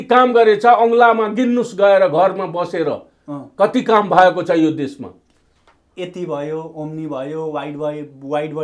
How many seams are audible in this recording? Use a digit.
0